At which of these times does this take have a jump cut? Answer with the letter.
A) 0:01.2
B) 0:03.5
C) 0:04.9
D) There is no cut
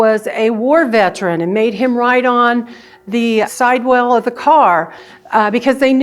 B